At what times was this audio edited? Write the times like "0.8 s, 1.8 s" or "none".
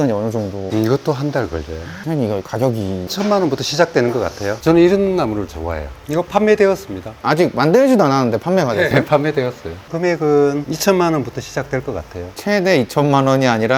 1.9 s, 4.5 s